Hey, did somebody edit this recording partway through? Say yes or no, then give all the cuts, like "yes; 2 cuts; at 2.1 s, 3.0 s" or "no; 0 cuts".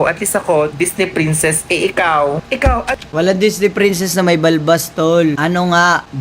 yes; 2 cuts; at 3.0 s, 5.4 s